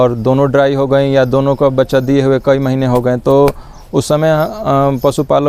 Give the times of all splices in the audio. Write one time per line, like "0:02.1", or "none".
none